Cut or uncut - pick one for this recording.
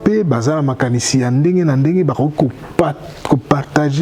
uncut